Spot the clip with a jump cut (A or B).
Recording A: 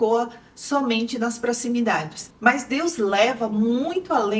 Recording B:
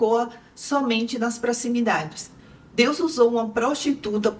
B